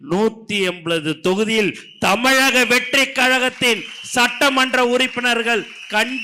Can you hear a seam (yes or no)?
no